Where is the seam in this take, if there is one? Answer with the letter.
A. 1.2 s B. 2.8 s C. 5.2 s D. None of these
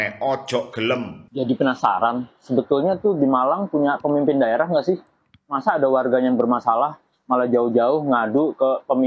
A